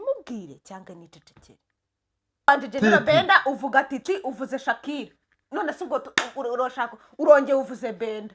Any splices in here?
yes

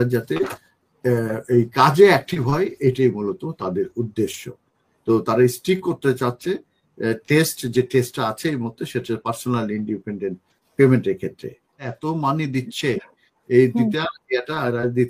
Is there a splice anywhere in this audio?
yes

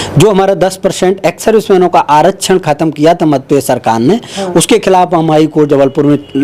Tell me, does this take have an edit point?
no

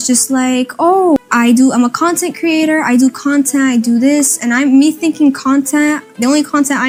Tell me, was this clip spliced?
no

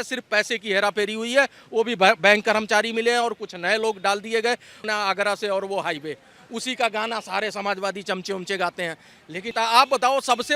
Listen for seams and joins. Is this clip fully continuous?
no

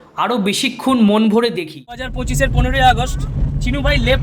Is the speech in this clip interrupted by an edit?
yes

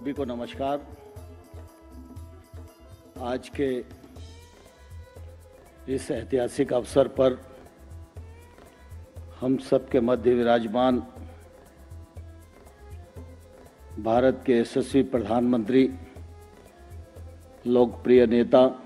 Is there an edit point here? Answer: no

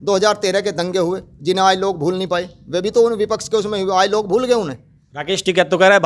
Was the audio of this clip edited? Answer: no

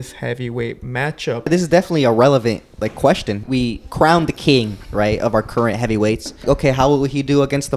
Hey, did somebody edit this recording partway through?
yes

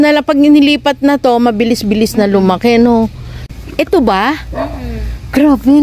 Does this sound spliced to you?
yes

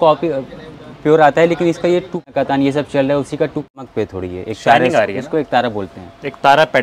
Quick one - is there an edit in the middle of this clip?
yes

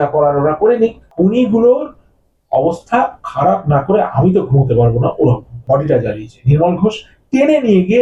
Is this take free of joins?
no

